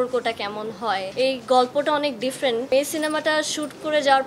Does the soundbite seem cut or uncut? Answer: cut